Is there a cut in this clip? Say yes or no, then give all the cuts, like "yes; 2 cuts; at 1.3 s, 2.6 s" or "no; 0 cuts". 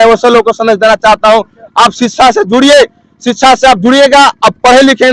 no; 0 cuts